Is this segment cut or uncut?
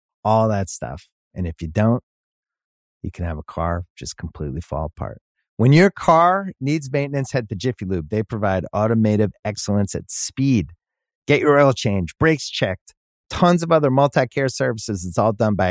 uncut